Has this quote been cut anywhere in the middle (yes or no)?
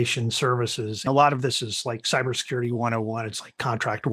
yes